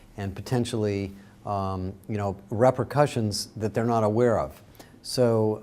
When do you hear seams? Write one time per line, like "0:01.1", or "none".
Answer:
0:03.4